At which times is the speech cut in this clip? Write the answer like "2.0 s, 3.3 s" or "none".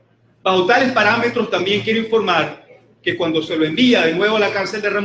4.1 s